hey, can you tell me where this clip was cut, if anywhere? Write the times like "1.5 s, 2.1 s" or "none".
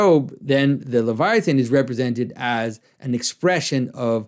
none